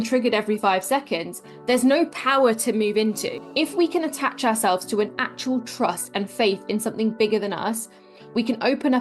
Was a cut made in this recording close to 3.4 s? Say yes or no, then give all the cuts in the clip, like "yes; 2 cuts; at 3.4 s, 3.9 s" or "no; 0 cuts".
yes; 1 cut; at 3.4 s